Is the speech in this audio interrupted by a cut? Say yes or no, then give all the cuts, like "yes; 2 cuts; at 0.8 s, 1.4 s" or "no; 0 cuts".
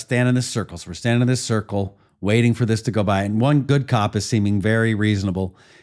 yes; 1 cut; at 3.7 s